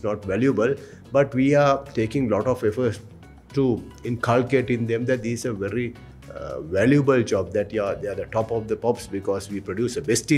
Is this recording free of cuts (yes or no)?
yes